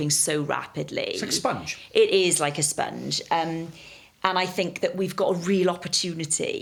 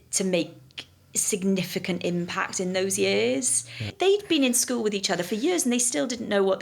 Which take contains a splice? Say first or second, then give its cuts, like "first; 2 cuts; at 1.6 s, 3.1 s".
second; 1 cut; at 3.9 s